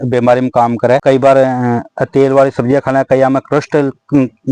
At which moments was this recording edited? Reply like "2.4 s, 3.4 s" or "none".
none